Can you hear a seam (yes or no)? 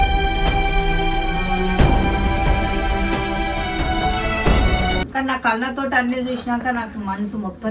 yes